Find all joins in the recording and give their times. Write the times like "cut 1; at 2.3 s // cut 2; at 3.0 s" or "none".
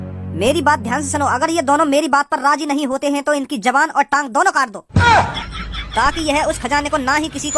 cut 1; at 4.8 s